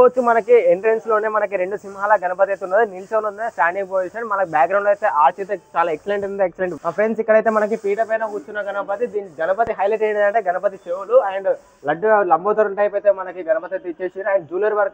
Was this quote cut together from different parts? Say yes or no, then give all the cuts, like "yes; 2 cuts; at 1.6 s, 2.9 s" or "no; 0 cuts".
yes; 1 cut; at 6.7 s